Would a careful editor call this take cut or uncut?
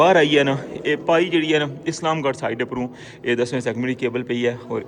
uncut